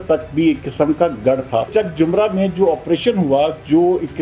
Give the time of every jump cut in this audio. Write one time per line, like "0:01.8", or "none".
0:01.7